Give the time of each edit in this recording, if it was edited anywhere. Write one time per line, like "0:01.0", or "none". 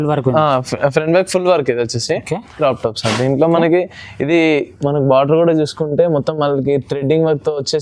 0:02.6